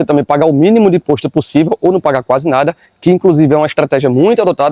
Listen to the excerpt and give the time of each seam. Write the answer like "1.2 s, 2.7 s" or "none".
none